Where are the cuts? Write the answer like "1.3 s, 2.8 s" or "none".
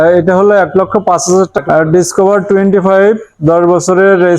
1.6 s